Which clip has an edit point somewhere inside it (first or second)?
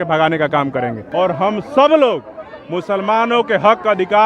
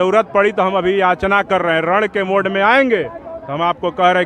first